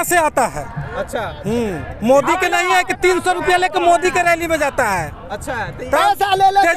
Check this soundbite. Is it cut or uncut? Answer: uncut